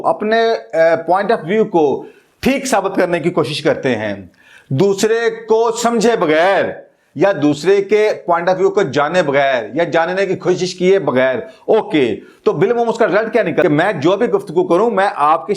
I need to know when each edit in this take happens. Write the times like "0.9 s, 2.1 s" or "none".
13.6 s